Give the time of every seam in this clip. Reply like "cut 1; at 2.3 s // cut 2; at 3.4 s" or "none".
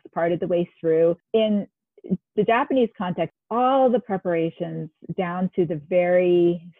cut 1; at 1.2 s // cut 2; at 3.3 s